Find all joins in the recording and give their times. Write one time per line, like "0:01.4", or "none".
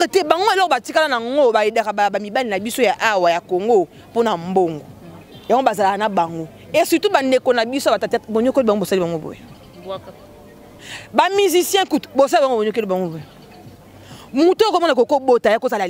none